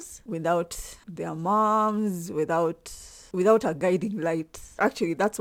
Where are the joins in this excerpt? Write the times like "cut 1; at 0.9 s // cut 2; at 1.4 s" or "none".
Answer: none